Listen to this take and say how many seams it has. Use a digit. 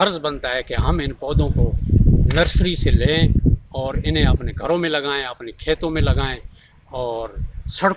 0